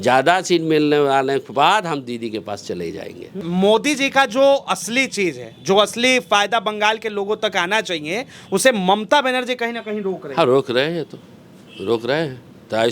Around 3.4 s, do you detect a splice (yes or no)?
yes